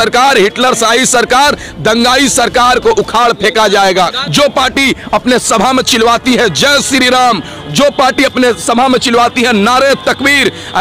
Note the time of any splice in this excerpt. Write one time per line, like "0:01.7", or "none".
0:04.2